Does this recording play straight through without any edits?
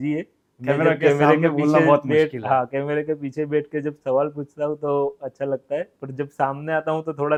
yes; 0 cuts

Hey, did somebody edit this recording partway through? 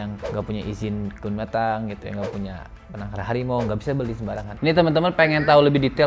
yes; 1 cut; at 4.5 s

